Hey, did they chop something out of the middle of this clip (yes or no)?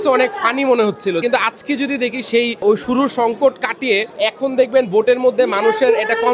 yes